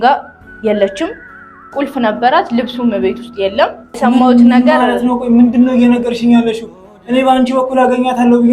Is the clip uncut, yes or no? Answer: no